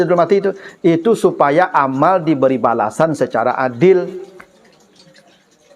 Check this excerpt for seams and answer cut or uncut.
uncut